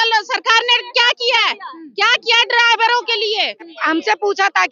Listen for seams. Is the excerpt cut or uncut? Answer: cut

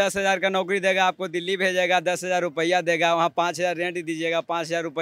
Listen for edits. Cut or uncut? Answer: uncut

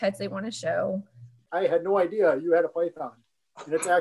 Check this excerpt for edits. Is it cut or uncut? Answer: cut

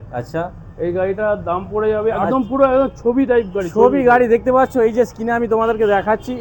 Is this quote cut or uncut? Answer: cut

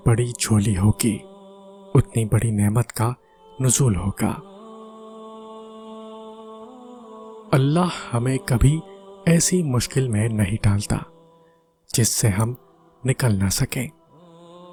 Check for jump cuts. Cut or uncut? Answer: uncut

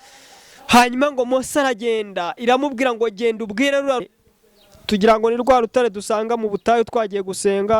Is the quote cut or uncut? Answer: cut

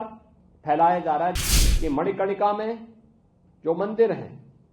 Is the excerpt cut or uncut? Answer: cut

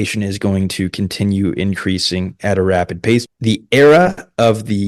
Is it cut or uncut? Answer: cut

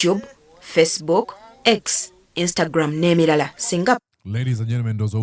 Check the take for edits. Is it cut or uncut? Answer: uncut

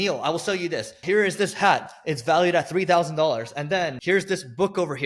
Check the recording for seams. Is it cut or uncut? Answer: cut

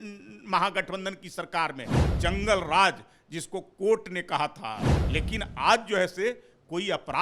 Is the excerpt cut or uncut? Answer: cut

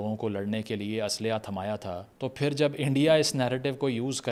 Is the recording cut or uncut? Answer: uncut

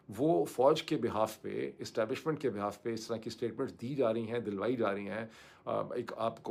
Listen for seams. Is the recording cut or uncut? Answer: uncut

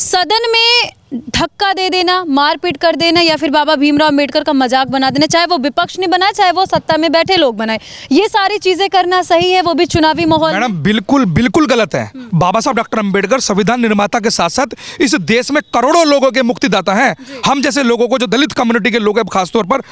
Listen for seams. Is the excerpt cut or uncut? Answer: uncut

